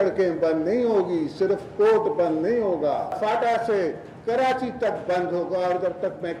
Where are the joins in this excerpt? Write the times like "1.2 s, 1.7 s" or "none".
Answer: 3.2 s